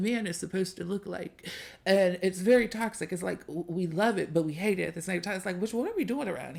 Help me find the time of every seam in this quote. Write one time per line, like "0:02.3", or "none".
none